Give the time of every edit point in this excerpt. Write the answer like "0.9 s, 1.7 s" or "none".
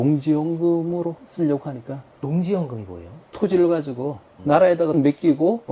1.2 s, 3.2 s